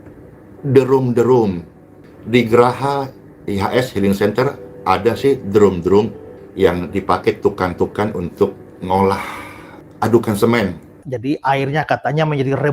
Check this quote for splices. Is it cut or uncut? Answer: cut